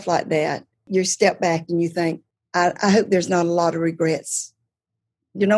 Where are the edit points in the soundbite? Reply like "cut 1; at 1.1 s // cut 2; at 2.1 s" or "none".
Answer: cut 1; at 0.9 s // cut 2; at 2.3 s